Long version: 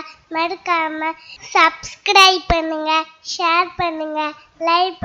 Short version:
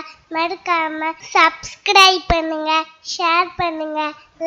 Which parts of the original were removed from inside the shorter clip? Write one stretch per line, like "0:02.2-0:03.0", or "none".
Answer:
0:01.2-0:01.4